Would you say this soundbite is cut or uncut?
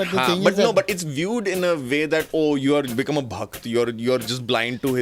uncut